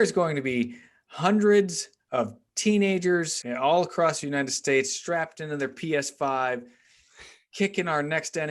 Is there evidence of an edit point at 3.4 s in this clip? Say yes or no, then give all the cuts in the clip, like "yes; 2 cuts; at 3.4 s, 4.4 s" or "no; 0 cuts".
yes; 1 cut; at 3.4 s